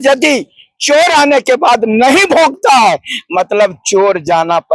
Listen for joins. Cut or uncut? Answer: uncut